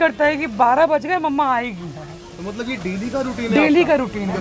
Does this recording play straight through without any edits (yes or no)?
yes